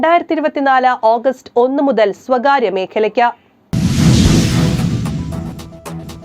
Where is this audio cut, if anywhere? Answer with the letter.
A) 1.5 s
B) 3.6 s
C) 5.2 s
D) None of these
B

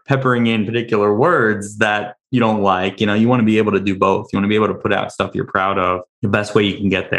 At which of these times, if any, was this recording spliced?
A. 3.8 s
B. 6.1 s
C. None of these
B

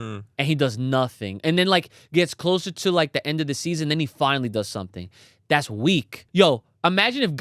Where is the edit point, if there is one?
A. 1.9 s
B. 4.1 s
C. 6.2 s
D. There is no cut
C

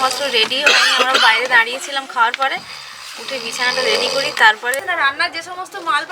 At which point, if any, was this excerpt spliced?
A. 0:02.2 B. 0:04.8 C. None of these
B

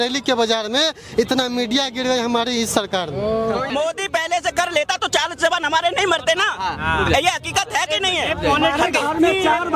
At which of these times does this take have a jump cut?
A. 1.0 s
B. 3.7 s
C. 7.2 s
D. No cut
B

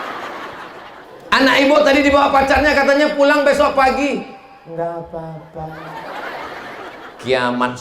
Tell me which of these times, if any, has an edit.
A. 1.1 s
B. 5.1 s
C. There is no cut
A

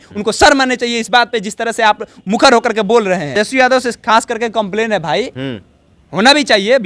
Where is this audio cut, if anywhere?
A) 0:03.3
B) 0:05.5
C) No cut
A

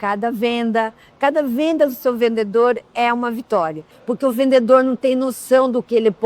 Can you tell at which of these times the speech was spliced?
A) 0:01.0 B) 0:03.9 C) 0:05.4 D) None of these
B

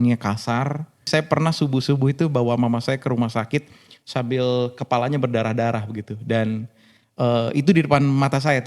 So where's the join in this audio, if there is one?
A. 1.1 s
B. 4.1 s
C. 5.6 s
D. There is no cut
A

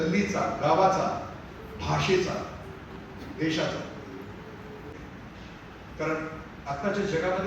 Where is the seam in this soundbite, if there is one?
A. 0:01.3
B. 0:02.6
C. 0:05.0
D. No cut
C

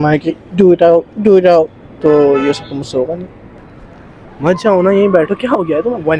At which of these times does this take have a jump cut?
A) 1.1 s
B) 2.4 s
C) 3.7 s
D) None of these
C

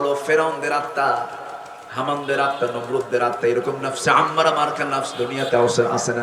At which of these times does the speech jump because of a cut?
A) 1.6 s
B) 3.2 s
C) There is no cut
C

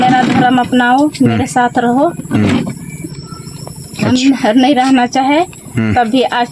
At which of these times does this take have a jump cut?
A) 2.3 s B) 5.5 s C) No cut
C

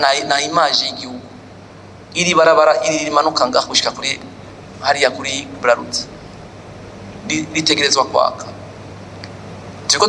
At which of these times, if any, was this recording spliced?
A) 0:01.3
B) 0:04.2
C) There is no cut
C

